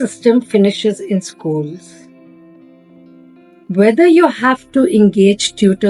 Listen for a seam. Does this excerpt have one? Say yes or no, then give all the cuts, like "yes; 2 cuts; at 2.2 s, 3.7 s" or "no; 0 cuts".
yes; 2 cuts; at 2.1 s, 3.7 s